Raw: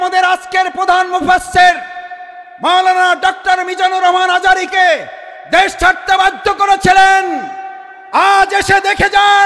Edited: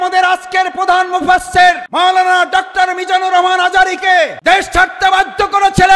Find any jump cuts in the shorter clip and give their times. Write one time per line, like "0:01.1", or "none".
0:01.8
0:04.3

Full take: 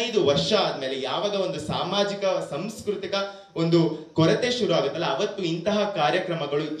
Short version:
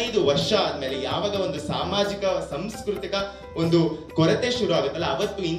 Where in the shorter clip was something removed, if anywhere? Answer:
none

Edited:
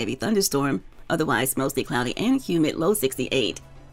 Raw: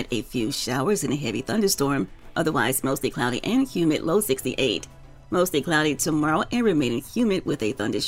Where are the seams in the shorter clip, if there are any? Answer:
none

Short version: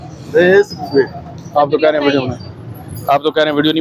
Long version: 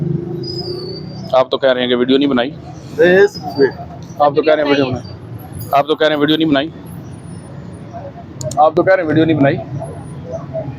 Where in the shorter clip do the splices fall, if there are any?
none

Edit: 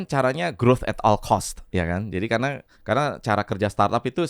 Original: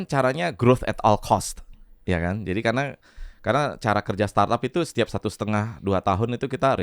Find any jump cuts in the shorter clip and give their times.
0:01.6
0:02.7

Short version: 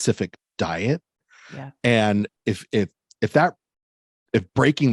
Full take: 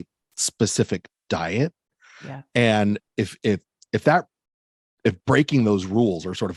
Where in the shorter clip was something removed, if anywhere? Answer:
none

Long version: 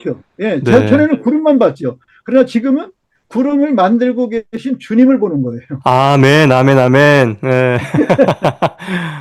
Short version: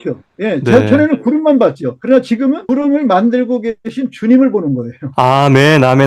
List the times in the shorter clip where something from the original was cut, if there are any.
0:02.2

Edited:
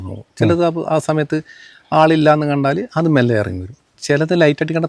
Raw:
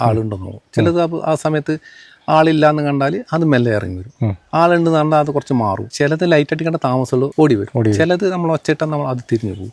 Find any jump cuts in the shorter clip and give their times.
0:03.9

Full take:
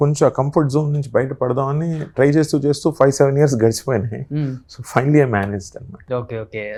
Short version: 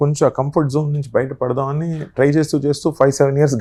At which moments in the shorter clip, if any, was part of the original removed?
none

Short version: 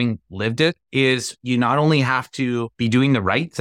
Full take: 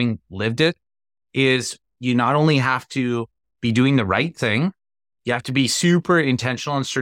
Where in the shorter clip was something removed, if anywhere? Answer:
0:01.2
0:02.7

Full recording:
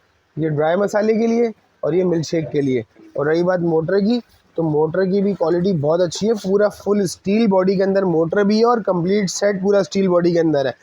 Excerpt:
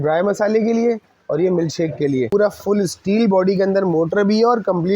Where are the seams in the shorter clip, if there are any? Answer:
0:02.3

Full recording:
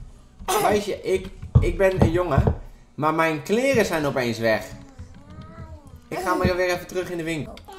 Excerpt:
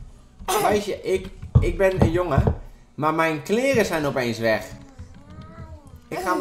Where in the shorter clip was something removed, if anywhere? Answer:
none

